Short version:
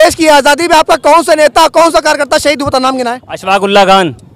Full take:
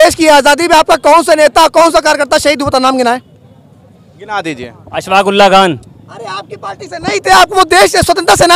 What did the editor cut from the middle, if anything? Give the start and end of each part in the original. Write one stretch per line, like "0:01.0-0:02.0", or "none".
0:03.3-0:04.9